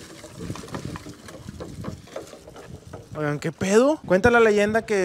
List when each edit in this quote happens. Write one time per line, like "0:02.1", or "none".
0:04.0

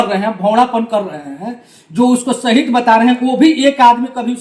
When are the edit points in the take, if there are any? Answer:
none

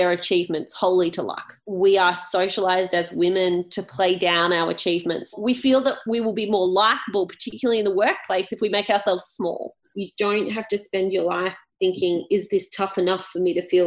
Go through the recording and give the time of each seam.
0:01.6
0:05.3
0:09.9

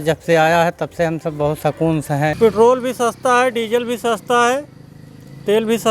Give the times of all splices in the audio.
0:02.3

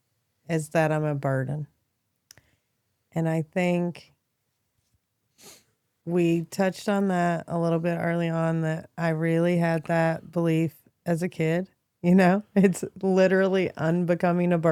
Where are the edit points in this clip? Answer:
none

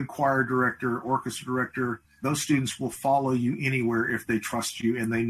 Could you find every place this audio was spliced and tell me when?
0:02.2

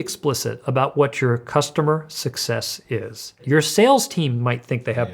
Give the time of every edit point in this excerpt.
0:03.3

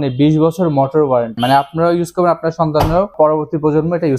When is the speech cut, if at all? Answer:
0:01.4
0:03.1

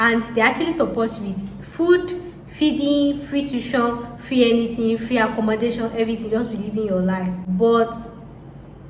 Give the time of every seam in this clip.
none

